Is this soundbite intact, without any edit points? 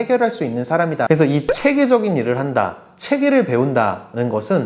no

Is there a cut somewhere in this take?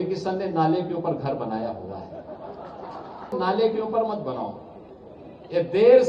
yes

